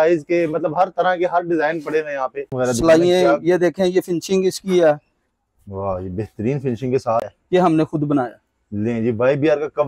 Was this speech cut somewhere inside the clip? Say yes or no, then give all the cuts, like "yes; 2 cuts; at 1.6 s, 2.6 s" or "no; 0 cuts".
yes; 2 cuts; at 2.5 s, 7.4 s